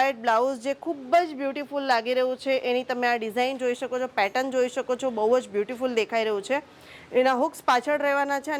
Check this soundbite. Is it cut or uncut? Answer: uncut